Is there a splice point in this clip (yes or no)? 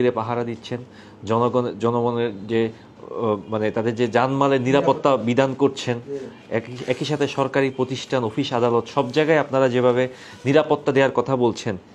no